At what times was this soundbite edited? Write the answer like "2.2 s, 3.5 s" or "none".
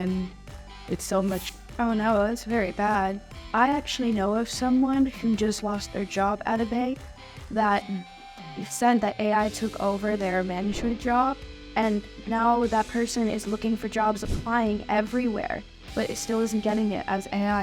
1.5 s